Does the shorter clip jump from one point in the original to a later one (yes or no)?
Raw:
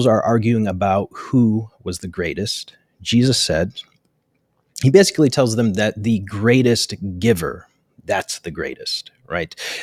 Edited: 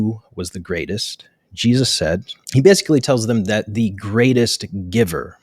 yes